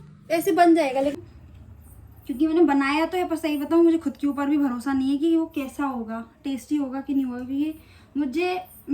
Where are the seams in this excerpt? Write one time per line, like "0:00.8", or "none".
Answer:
0:01.1